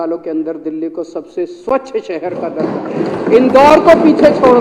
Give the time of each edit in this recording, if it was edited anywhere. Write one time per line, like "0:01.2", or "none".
none